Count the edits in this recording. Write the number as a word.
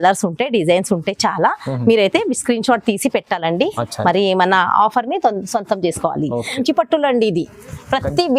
one